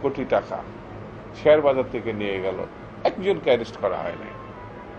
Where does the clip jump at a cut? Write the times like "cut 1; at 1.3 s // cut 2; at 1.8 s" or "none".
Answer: none